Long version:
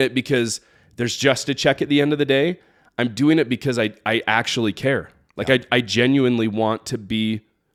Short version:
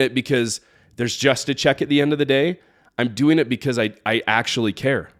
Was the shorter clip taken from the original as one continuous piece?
yes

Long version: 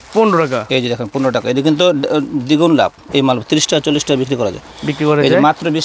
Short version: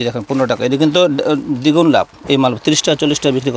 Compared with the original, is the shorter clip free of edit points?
yes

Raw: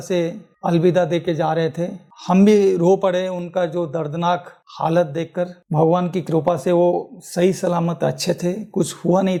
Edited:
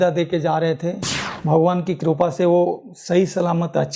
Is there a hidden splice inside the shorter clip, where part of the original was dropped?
yes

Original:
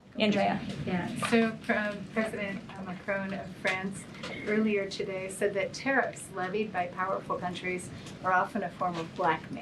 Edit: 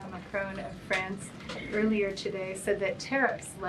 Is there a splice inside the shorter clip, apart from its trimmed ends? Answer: no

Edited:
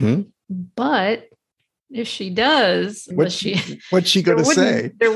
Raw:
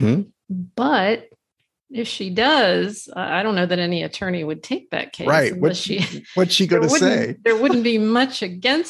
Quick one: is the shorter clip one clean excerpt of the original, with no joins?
no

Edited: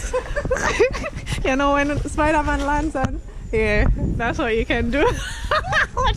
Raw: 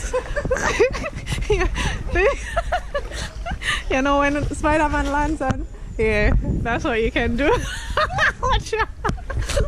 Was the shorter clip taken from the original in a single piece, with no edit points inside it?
no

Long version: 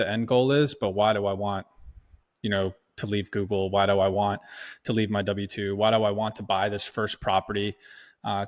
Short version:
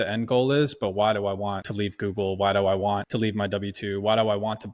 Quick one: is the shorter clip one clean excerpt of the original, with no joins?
no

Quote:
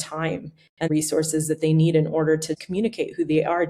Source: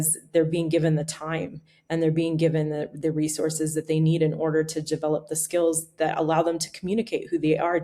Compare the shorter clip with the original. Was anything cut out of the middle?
yes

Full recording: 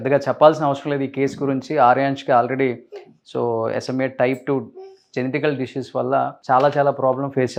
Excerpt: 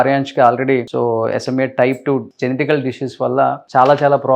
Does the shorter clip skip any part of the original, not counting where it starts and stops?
yes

